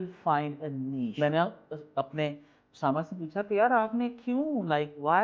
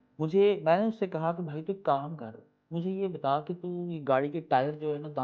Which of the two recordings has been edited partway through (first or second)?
first